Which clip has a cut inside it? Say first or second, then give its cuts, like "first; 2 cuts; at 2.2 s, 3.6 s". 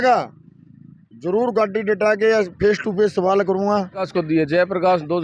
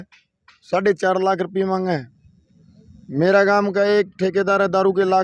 first; 1 cut; at 4.1 s